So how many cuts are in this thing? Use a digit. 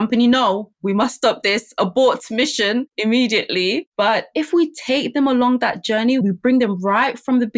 1